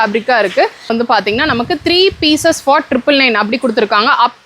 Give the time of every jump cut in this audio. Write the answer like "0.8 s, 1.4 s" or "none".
0.9 s